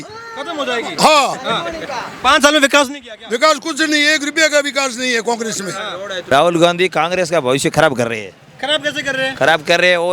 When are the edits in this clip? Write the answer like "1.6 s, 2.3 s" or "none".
6.3 s